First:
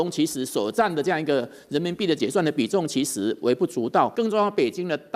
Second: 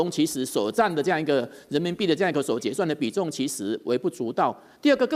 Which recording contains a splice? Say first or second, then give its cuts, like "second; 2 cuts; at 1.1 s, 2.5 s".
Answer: first; 2 cuts; at 2.2 s, 4.1 s